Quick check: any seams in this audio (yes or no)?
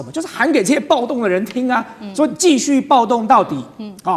no